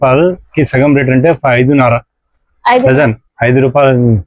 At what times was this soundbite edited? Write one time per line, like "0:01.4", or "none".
none

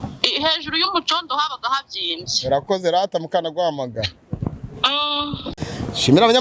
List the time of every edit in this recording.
0:05.4

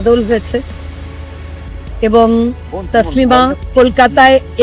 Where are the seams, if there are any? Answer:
0:03.6

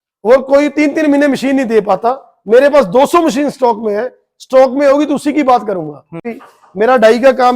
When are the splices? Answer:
0:06.3

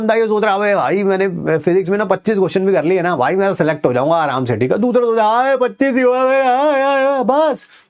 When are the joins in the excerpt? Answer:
none

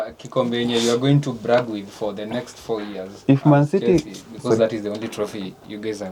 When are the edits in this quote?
none

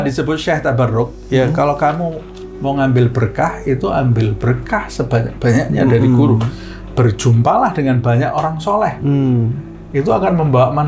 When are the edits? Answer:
none

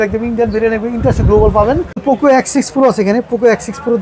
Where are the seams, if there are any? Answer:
0:02.0

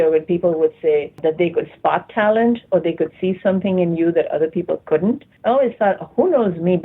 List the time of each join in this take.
0:01.2
0:05.3

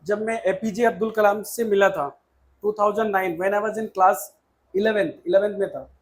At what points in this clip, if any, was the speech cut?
none

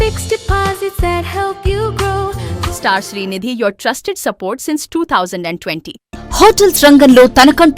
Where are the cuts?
0:02.5
0:06.0

